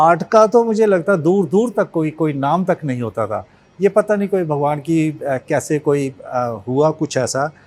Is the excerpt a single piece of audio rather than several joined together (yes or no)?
yes